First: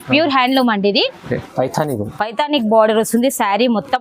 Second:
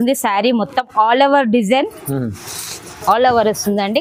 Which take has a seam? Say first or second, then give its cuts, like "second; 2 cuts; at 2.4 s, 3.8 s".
first; 1 cut; at 1.5 s